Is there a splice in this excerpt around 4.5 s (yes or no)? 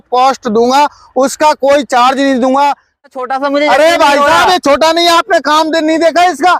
no